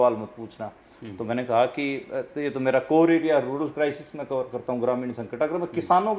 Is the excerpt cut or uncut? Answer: uncut